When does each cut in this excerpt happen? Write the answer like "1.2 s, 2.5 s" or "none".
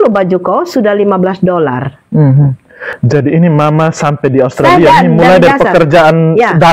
none